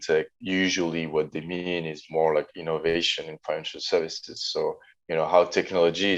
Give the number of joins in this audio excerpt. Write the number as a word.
one